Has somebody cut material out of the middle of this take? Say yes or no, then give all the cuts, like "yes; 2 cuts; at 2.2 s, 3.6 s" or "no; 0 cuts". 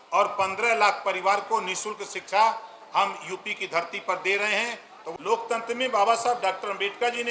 yes; 1 cut; at 5.0 s